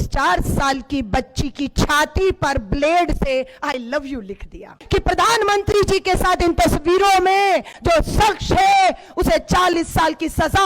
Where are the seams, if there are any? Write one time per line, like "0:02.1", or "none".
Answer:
0:04.8